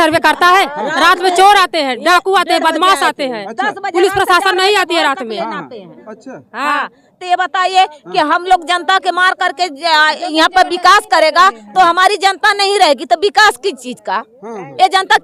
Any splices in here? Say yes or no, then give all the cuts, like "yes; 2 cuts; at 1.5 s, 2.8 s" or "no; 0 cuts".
no; 0 cuts